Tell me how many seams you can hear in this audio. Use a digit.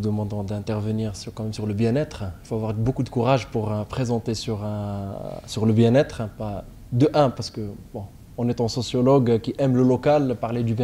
0